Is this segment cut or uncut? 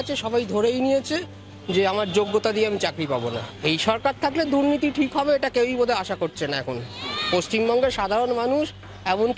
cut